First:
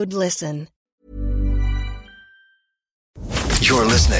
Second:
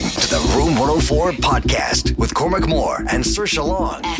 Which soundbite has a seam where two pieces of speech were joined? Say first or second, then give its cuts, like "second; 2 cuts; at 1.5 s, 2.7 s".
first; 1 cut; at 3.2 s